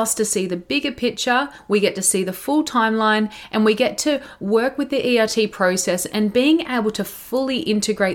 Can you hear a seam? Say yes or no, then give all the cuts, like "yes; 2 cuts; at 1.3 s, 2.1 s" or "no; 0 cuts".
no; 0 cuts